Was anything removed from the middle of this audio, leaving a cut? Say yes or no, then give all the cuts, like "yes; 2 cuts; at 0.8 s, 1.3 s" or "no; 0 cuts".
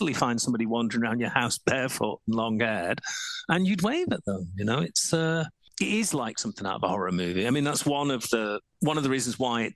yes; 2 cuts; at 5.6 s, 8.7 s